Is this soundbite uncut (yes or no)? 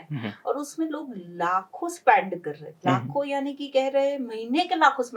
yes